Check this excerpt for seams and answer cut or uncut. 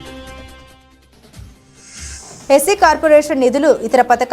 cut